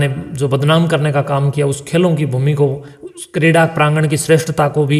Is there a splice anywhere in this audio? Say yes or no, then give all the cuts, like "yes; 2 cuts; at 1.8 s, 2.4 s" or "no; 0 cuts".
no; 0 cuts